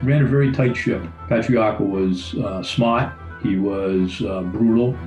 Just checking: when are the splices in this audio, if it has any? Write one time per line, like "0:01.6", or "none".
none